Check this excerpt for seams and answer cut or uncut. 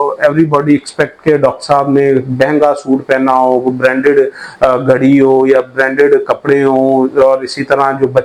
uncut